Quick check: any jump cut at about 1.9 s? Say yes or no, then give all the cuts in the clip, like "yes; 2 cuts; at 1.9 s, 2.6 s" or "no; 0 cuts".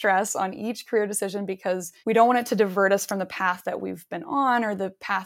yes; 1 cut; at 1.9 s